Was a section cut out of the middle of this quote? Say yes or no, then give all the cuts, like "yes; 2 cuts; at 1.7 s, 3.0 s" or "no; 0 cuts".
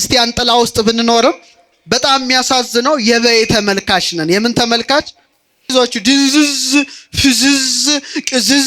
yes; 1 cut; at 5.7 s